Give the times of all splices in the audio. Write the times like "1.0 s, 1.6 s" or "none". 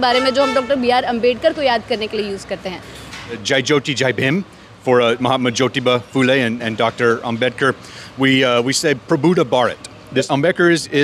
3.4 s, 10.3 s